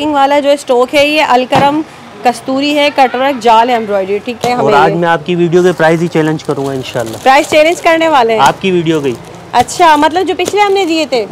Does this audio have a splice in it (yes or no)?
yes